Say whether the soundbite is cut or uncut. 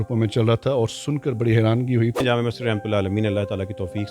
cut